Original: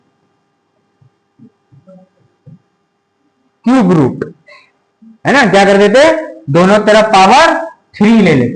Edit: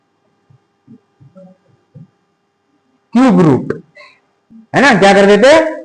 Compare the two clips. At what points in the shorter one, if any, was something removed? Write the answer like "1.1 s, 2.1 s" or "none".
none